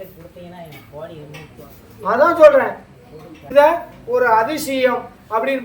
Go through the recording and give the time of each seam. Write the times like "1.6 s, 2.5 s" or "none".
3.4 s